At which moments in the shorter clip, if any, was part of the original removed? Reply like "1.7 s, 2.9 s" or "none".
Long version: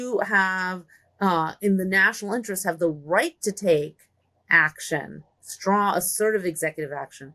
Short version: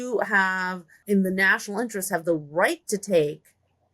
1.0 s